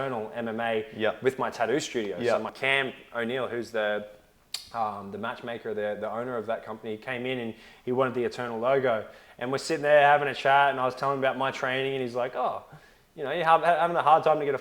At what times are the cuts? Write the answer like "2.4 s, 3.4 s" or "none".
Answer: 2.5 s

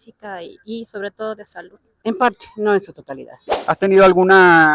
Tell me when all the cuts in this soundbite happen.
1.9 s, 3.6 s

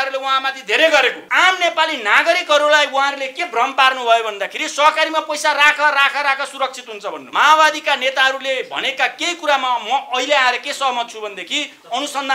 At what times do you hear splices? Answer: 1.2 s, 7.2 s

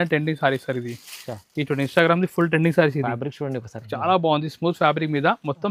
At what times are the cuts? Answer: none

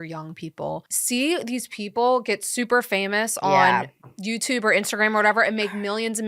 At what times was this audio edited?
0.9 s

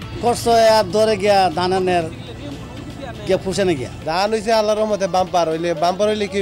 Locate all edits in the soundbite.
none

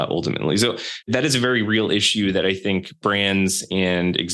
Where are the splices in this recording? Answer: 1.1 s, 3.0 s

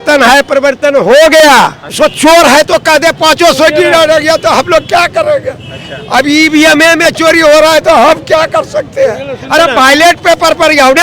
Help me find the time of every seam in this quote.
1.9 s

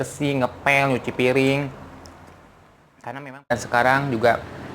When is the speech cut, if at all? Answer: 3.5 s

